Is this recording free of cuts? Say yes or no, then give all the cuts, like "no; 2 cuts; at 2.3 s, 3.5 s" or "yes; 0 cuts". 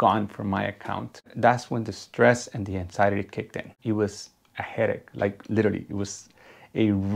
no; 2 cuts; at 1.3 s, 3.7 s